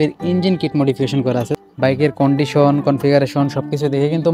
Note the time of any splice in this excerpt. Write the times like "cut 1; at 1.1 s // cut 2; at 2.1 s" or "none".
cut 1; at 1.5 s